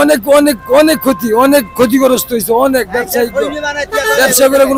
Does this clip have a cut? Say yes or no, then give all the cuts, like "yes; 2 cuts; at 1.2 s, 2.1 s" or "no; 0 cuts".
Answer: no; 0 cuts